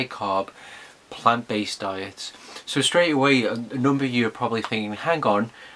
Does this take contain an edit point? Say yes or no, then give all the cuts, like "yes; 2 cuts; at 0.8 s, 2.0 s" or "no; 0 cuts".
yes; 1 cut; at 2.5 s